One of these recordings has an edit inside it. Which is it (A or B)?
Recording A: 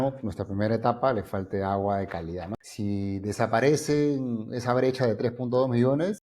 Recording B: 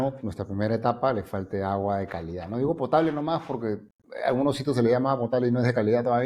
A